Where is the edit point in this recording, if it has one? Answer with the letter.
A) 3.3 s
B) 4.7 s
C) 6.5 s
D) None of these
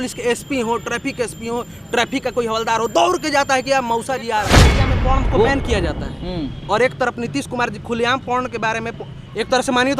B